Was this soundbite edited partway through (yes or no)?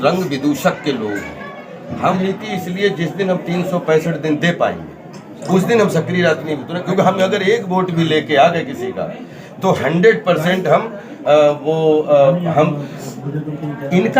yes